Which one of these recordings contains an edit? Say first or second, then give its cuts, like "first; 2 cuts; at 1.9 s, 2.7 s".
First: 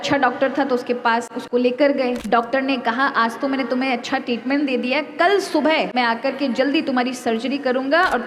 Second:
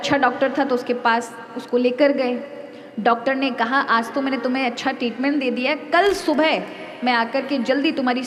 first; 3 cuts; at 1.3 s, 2.2 s, 5.9 s